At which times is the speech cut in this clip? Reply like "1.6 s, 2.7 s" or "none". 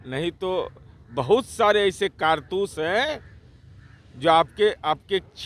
none